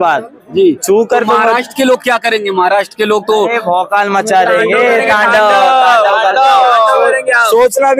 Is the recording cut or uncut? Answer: uncut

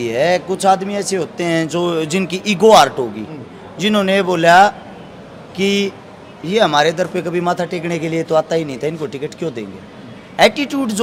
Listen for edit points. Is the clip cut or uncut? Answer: uncut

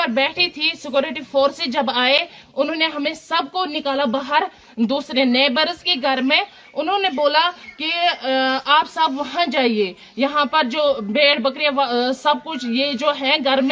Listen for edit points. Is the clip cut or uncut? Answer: uncut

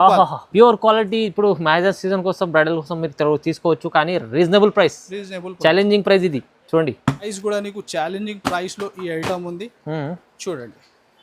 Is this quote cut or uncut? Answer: cut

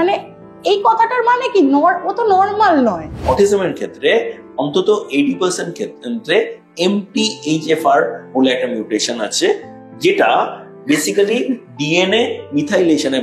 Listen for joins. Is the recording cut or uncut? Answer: cut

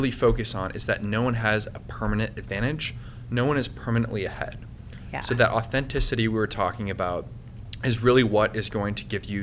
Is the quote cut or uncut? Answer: uncut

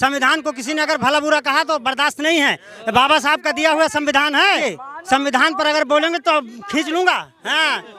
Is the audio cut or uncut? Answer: uncut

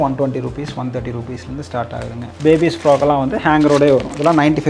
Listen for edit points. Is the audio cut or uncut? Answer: uncut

